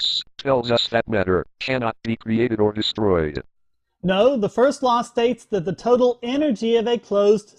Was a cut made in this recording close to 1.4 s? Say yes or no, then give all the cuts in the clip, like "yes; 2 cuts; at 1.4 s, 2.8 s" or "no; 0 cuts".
no; 1 cut; at 4.2 s